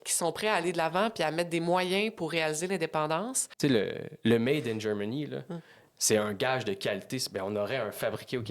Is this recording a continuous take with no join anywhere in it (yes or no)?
no